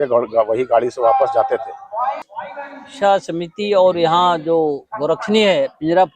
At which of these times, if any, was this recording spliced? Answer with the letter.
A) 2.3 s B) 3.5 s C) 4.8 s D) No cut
A